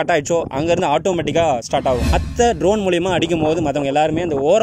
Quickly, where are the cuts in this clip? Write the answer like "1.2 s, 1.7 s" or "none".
2.1 s

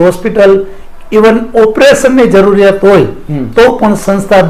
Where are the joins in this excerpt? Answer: none

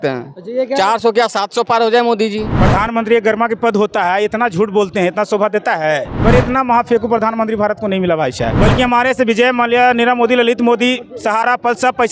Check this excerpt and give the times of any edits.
2.5 s, 6.1 s, 8.5 s

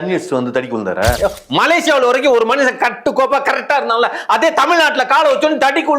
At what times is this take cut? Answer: 1.2 s

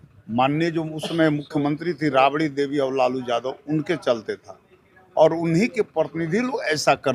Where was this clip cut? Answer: none

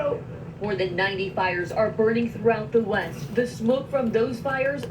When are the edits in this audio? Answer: 3.8 s

